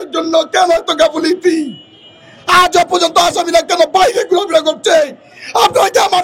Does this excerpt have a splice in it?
no; 0 cuts

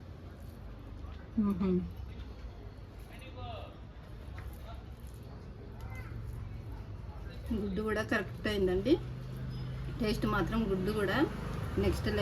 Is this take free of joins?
yes; 0 cuts

